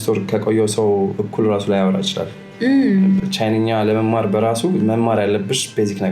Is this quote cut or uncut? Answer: uncut